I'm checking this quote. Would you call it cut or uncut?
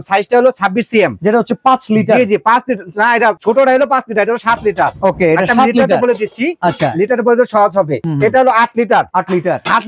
uncut